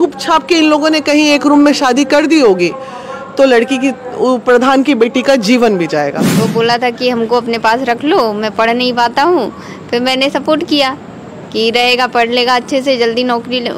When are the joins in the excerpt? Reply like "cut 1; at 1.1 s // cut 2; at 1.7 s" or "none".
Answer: cut 1; at 6.3 s